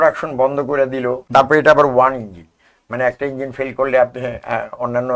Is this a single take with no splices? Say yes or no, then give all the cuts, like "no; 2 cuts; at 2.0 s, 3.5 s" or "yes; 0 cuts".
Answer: no; 1 cut; at 1.2 s